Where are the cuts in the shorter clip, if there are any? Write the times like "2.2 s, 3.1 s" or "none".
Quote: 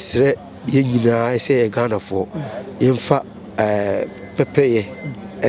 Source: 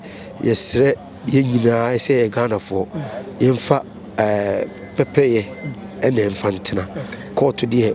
none